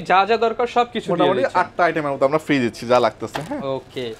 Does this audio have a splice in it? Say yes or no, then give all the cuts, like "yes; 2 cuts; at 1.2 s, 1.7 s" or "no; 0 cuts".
no; 0 cuts